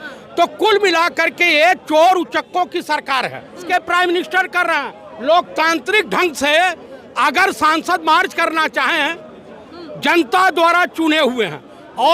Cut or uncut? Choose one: cut